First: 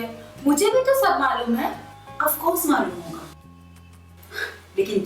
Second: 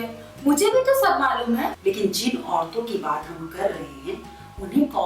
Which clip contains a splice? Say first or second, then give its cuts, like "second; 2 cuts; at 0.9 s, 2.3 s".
second; 1 cut; at 1.8 s